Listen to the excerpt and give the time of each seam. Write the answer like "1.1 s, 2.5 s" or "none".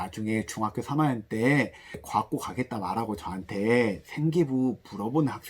2.0 s